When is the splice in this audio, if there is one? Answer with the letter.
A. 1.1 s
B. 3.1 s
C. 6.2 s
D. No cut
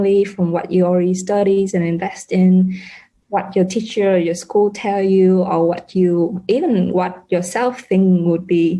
B